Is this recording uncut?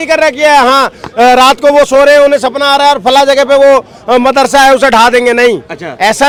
yes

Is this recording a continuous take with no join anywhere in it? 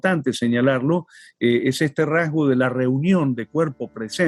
yes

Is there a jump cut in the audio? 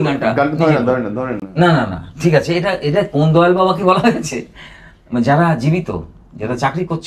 no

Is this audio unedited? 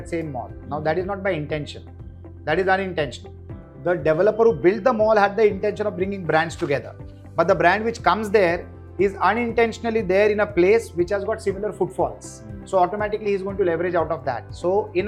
yes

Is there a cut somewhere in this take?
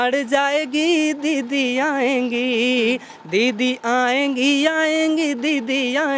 no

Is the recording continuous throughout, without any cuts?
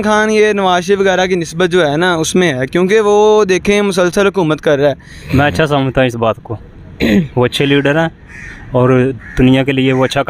no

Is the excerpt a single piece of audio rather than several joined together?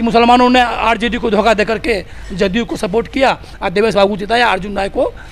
yes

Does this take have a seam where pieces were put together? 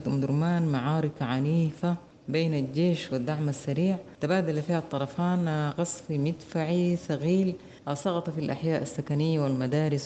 no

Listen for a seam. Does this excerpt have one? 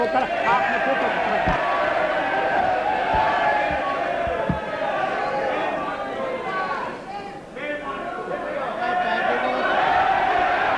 no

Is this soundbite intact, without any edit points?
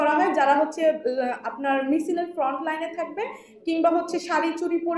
yes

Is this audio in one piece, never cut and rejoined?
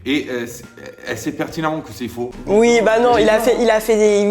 no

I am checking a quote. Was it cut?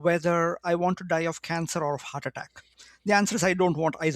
no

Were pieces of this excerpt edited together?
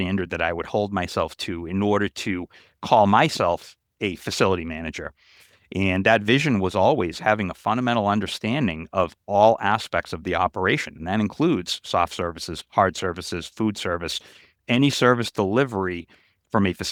no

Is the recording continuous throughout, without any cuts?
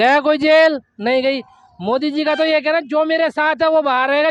yes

